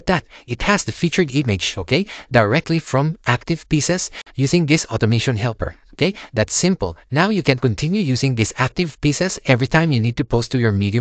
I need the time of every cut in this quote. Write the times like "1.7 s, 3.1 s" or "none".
none